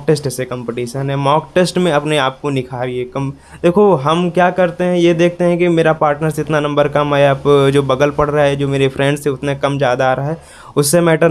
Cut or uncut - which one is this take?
uncut